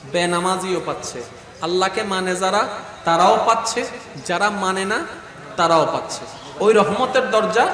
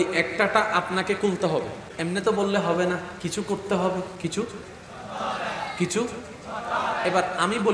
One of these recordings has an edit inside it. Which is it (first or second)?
second